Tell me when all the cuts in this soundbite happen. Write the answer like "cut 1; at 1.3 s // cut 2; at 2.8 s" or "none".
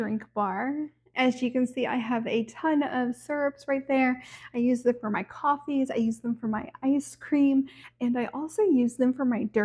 none